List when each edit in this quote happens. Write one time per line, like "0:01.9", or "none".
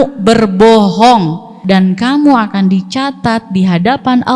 0:01.6